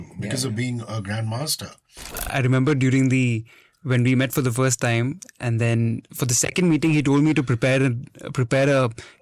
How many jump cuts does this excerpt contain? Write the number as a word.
one